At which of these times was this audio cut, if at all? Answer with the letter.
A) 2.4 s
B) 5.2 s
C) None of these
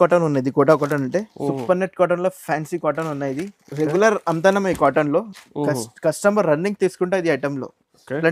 C